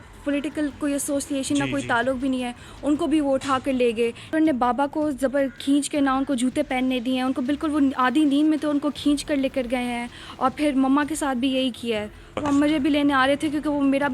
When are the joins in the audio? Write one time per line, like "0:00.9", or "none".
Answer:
0:04.3
0:12.3